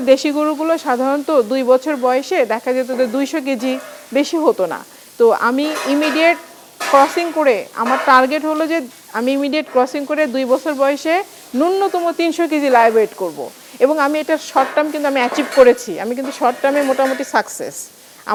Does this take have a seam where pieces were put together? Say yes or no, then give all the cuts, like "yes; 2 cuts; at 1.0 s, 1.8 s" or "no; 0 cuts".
no; 0 cuts